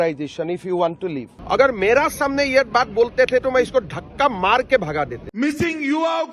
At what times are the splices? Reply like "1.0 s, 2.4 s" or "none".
1.3 s, 5.2 s